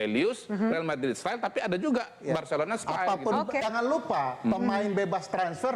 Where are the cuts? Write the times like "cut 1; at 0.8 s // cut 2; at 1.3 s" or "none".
cut 1; at 3.6 s